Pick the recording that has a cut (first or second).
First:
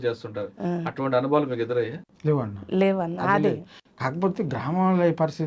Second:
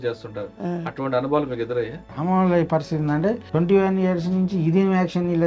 second